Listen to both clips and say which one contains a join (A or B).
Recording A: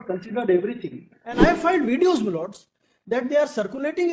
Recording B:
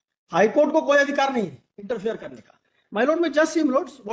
A